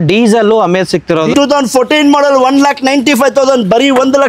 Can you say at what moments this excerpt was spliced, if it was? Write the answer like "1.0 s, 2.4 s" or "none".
1.3 s

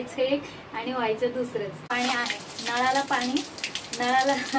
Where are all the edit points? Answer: 1.8 s

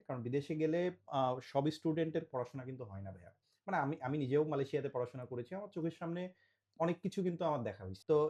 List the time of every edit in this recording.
none

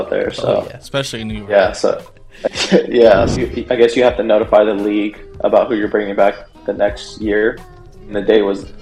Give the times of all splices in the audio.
3.3 s

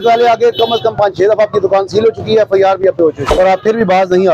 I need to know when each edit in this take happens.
3.2 s

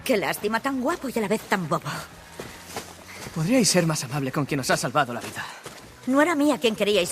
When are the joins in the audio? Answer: 5.8 s

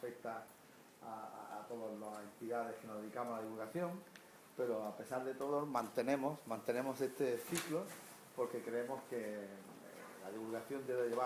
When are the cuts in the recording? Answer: none

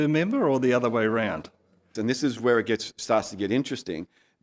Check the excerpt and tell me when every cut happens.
1.9 s

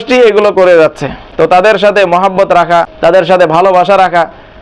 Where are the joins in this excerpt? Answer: 1.6 s, 2.9 s

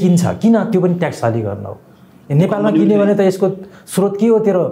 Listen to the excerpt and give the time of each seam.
none

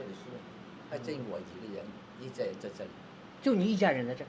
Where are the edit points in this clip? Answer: none

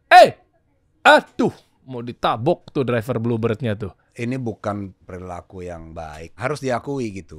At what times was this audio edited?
4.0 s, 5.0 s, 6.4 s

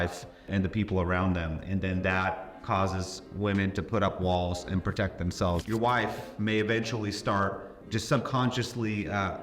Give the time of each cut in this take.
5.6 s

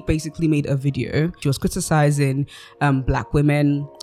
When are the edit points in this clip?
1.4 s

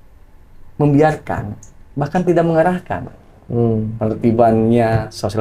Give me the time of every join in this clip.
none

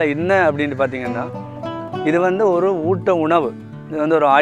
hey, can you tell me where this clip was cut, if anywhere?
none

